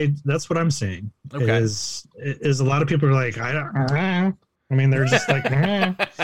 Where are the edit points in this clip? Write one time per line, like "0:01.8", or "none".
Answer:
none